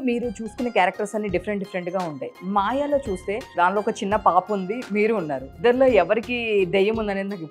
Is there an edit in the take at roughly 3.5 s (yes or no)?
yes